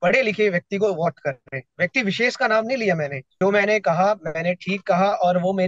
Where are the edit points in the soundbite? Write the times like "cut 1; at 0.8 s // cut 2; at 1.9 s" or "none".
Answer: cut 1; at 3.2 s